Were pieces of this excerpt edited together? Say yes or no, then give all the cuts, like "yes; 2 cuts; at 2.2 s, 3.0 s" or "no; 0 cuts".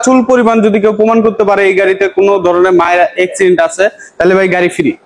no; 0 cuts